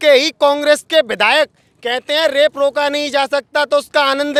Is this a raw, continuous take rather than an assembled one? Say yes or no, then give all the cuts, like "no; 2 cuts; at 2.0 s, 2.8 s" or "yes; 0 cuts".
yes; 0 cuts